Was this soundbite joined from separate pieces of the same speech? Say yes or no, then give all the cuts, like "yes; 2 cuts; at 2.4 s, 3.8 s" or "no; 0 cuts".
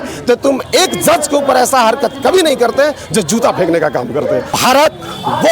yes; 1 cut; at 4.5 s